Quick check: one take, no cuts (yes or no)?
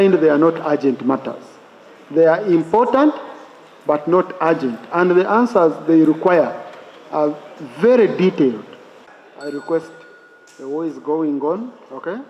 no